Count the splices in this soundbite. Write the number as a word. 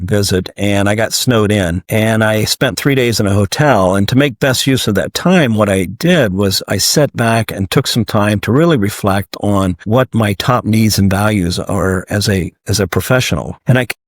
one